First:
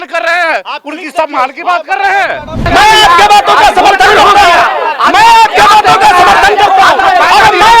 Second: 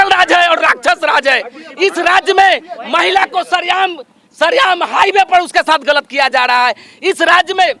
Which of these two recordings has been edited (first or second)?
first